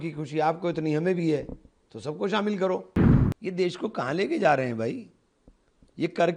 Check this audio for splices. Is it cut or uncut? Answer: cut